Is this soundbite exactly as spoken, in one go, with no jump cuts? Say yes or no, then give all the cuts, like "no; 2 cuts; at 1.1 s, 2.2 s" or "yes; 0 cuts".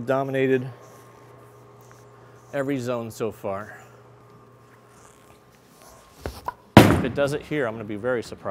no; 1 cut; at 4.2 s